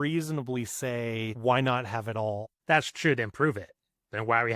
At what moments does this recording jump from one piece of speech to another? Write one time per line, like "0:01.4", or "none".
0:01.3
0:02.5